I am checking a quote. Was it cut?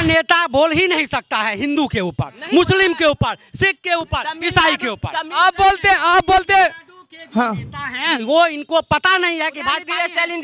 no; 0 cuts

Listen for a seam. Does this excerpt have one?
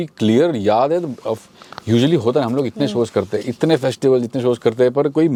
no; 0 cuts

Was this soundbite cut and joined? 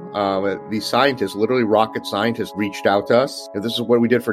yes; 1 cut; at 2.4 s

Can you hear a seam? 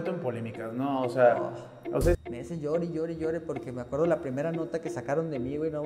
yes; 1 cut; at 2.2 s

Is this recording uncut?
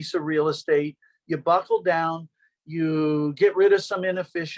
yes; 0 cuts

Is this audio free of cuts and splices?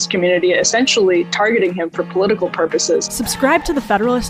no; 1 cut; at 3.2 s

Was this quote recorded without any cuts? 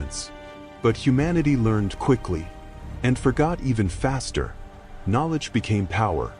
yes; 0 cuts

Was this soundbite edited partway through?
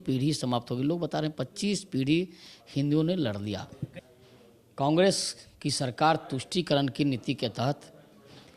yes; 1 cut; at 3.9 s

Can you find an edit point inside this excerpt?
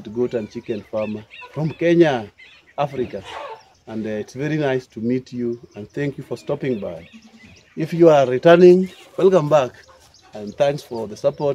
no; 0 cuts

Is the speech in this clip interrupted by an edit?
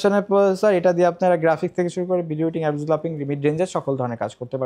no; 0 cuts

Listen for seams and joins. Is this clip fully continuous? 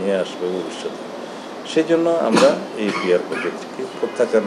yes; 0 cuts

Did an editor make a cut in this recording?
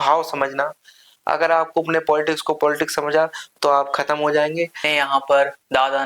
yes; 1 cut; at 4.8 s

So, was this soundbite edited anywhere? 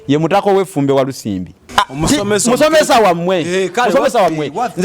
yes; 1 cut; at 1.6 s

